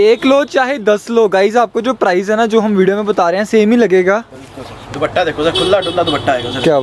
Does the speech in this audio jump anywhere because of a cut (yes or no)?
no